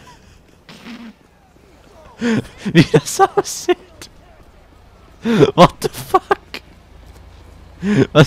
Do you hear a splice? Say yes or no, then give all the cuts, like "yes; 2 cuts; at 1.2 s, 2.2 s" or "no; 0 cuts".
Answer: no; 0 cuts